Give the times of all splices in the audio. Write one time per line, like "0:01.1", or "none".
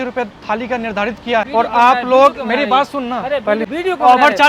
0:01.5
0:03.6